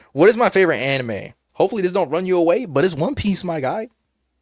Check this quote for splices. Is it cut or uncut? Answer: uncut